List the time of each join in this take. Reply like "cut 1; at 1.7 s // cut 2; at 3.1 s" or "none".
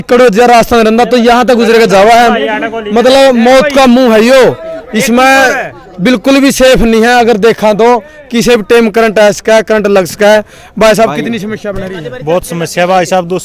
none